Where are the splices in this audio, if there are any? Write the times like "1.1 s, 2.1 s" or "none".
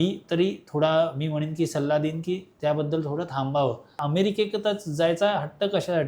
4.0 s